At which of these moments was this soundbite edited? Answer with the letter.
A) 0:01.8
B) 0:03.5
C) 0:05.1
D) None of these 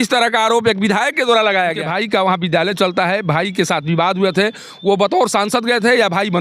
A